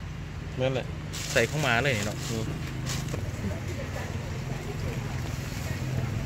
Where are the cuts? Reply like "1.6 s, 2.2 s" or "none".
3.1 s